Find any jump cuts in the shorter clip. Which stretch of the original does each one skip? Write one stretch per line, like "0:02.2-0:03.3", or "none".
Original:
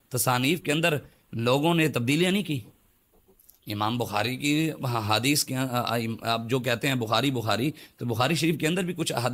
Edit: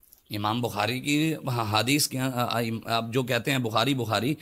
none